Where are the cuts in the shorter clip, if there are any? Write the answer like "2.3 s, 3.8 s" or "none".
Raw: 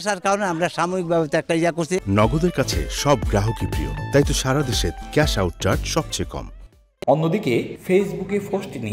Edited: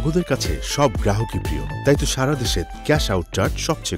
none

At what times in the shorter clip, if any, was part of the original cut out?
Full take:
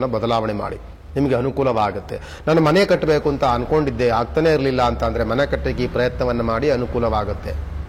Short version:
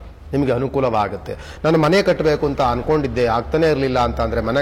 none

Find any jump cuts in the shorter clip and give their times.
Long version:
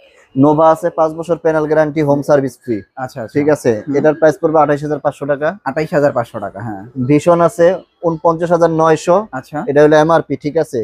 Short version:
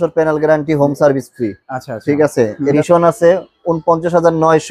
2.7 s

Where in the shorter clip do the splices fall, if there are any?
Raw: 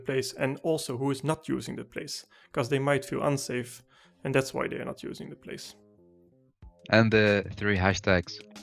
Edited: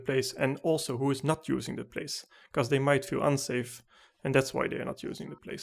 none

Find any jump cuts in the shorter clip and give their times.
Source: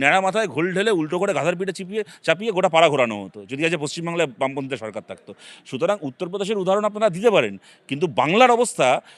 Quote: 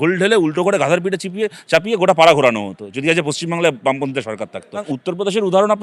4.9 s

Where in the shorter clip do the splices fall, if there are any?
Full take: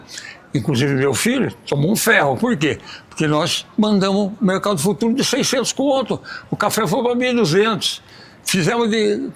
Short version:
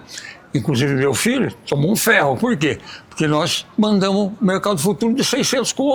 none

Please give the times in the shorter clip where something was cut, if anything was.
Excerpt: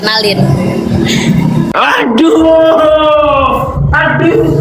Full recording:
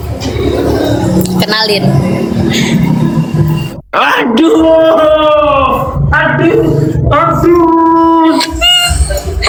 1.7 s

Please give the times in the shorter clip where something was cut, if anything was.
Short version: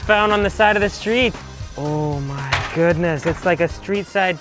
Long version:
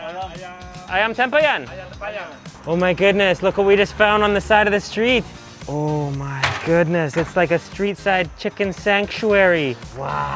none

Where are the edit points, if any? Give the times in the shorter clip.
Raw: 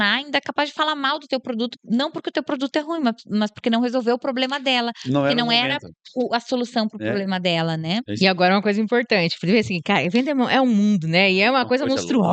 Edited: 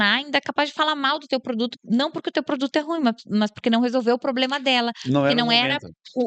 none

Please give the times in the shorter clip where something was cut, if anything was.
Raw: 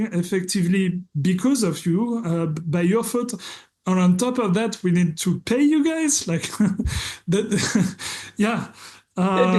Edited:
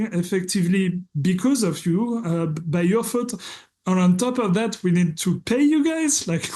none

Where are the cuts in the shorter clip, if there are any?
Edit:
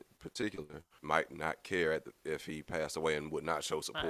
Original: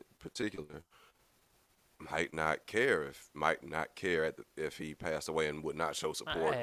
0.9 s

